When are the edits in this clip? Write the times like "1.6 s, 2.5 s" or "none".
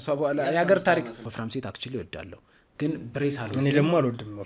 1.2 s